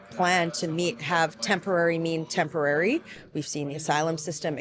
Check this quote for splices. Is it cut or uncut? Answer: cut